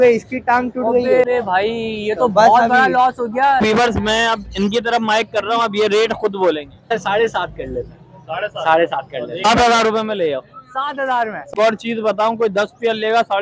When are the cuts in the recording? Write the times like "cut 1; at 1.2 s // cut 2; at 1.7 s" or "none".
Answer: cut 1; at 1.2 s // cut 2; at 3.6 s // cut 3; at 6.9 s // cut 4; at 9.4 s // cut 5; at 11.4 s